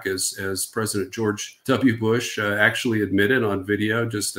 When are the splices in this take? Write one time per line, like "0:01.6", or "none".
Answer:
0:01.5